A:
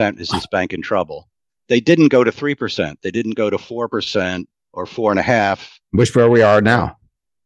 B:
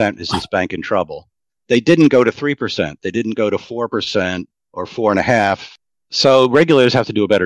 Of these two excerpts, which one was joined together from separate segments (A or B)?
B